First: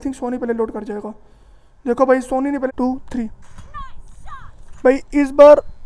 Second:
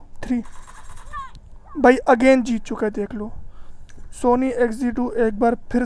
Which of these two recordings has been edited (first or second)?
first